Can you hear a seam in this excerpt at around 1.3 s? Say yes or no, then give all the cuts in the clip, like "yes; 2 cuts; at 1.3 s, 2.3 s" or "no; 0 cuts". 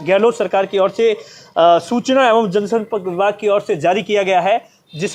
no; 0 cuts